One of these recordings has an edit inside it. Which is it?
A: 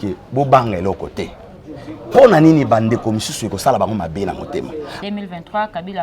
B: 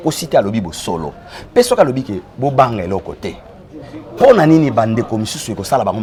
A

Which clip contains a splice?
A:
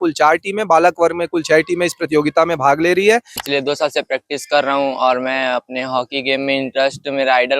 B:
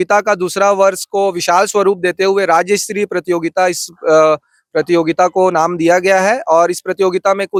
A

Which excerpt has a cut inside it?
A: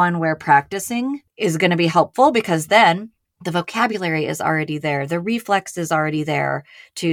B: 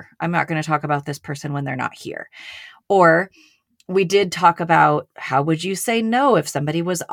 A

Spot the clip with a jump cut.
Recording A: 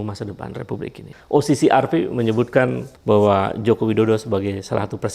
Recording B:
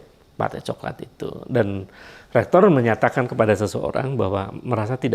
A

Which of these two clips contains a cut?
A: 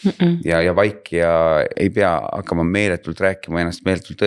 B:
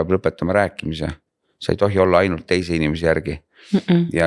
A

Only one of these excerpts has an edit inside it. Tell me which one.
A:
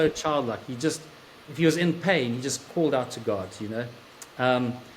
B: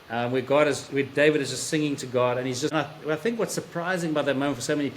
B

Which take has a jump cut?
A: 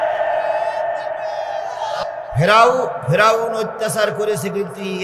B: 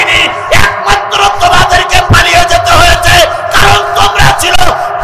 A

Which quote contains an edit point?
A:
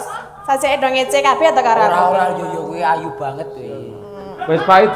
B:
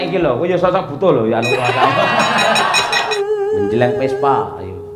B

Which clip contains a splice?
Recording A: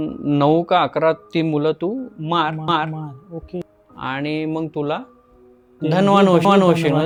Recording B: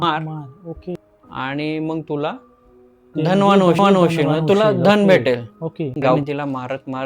B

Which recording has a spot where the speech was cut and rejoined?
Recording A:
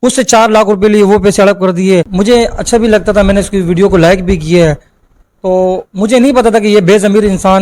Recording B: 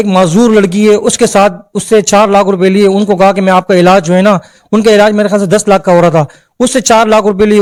A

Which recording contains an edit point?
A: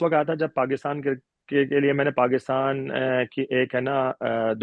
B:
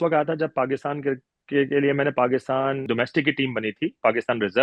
B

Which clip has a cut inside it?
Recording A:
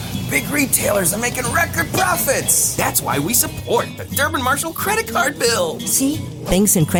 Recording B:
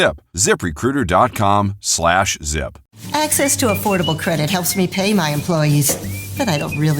B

